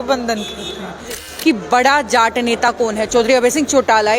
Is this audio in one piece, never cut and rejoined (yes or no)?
no